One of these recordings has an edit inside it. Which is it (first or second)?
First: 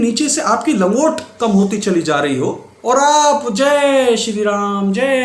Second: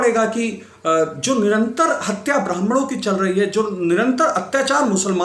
first